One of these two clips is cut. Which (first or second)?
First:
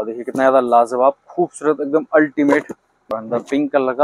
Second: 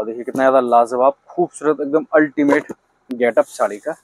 first